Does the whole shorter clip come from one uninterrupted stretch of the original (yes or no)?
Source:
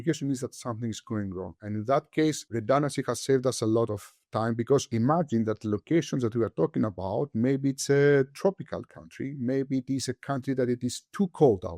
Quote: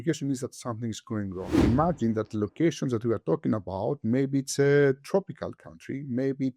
no